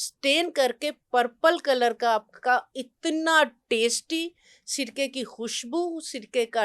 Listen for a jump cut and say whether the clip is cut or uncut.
uncut